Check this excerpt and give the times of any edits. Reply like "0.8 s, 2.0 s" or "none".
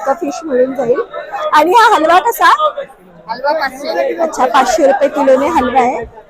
none